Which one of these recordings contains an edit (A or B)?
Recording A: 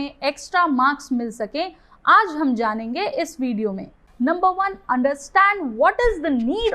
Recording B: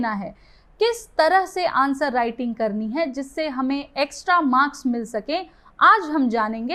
A